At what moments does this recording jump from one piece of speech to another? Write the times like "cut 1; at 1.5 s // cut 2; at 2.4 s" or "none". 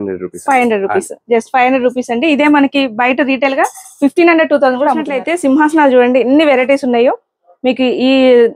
cut 1; at 5.2 s